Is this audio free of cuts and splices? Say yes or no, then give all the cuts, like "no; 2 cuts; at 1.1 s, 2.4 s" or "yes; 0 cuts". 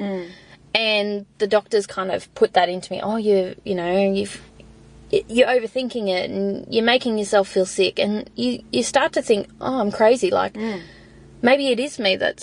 yes; 0 cuts